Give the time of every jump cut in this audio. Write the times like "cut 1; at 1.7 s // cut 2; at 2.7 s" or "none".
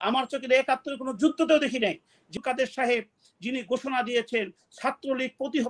cut 1; at 2.3 s